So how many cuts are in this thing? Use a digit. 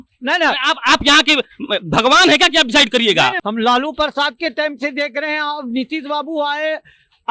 1